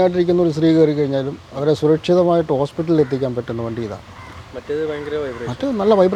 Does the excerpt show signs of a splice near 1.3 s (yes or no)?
no